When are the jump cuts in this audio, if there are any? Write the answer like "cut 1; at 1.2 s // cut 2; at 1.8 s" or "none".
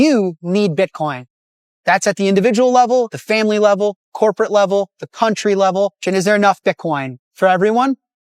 cut 1; at 6.0 s